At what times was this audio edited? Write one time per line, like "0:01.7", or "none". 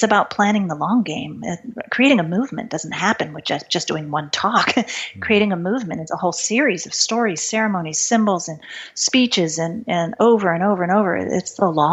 none